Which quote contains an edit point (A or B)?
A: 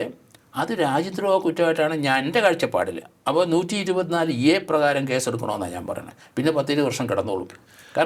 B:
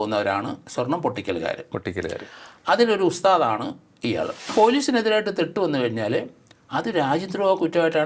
B